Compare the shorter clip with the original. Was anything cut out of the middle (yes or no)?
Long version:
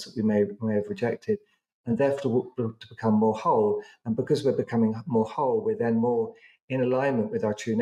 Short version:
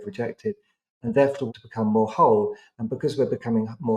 yes